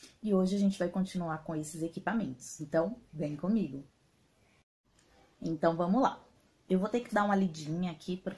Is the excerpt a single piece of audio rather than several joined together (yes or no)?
no